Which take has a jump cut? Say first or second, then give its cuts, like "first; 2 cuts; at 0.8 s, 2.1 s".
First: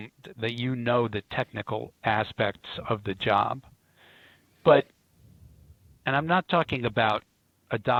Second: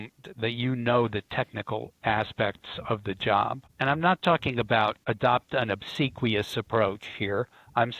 second; 2 cuts; at 3.7 s, 5.0 s